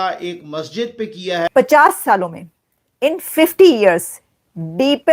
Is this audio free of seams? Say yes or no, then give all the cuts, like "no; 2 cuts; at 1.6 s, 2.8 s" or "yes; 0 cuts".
no; 1 cut; at 1.5 s